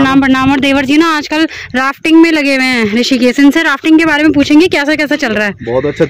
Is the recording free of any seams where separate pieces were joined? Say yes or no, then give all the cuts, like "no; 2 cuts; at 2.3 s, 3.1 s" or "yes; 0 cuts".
yes; 0 cuts